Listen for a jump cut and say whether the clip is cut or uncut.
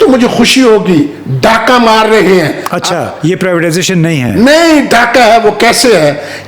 uncut